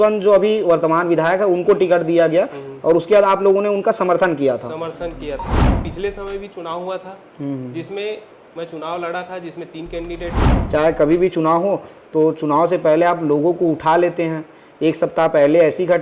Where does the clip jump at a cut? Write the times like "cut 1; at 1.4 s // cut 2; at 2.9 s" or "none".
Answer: cut 1; at 5.8 s // cut 2; at 10.5 s